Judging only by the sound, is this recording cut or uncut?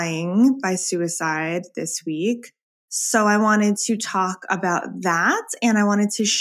uncut